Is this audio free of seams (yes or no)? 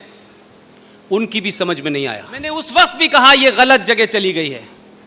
no